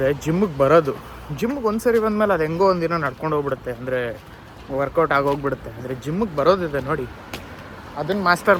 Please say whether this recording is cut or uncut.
uncut